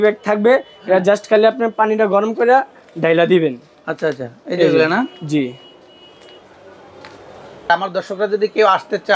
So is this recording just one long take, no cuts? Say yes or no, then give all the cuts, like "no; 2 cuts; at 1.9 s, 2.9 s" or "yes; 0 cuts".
yes; 0 cuts